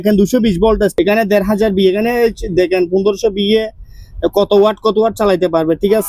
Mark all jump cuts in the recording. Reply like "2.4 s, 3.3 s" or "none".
0.9 s